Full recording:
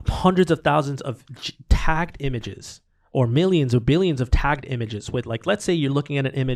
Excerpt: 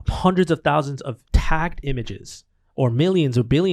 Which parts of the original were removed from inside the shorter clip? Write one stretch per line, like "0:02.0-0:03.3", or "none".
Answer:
0:01.2-0:01.6